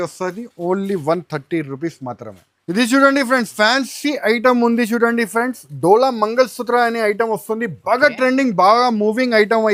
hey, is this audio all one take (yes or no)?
yes